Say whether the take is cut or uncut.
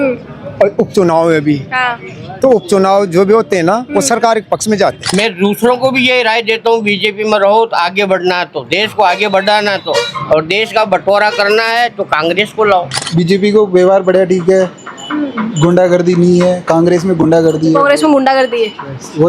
cut